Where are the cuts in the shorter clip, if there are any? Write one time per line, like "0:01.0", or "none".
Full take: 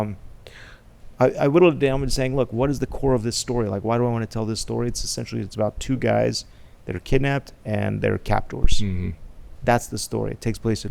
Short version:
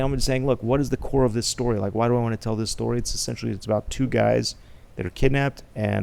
none